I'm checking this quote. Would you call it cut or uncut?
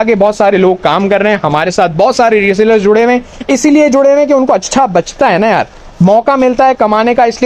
uncut